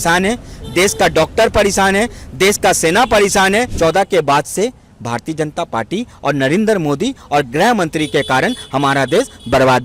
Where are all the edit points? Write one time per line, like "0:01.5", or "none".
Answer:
0:03.7